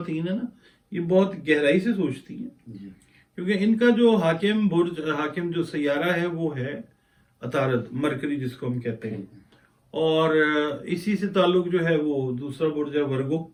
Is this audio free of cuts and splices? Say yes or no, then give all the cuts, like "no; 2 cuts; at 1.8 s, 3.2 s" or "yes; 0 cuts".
yes; 0 cuts